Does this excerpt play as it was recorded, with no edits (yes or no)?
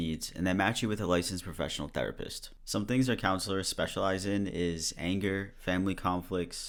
yes